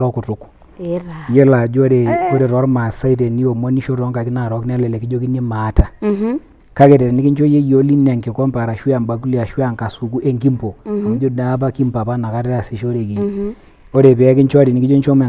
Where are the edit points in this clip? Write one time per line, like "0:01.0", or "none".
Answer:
none

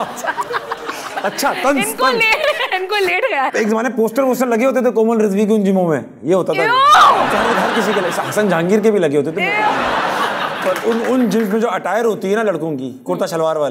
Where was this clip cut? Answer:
0:03.5
0:07.3
0:10.6

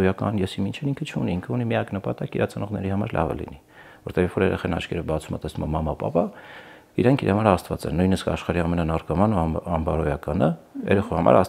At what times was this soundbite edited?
none

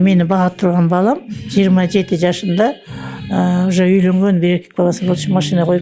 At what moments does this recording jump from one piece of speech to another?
none

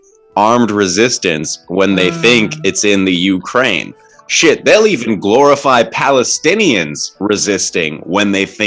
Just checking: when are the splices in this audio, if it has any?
none

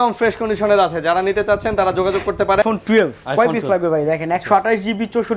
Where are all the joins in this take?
0:02.6

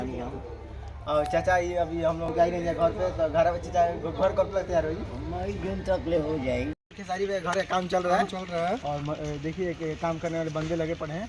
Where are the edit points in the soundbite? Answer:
0:02.2
0:06.8

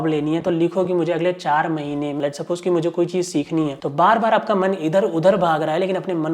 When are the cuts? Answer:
0:02.2

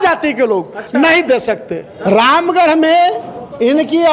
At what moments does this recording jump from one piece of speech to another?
0:01.9

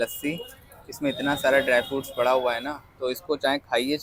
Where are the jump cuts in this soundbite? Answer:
none

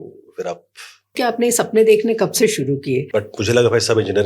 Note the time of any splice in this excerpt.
0:01.1
0:03.1

